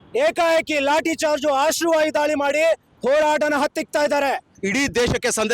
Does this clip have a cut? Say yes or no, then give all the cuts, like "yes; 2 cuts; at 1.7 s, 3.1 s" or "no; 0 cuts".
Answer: yes; 1 cut; at 4.5 s